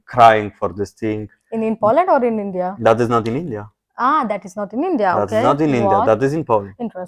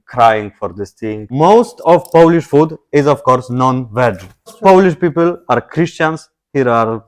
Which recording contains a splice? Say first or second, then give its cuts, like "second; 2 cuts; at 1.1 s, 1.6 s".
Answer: second; 2 cuts; at 1.3 s, 4.5 s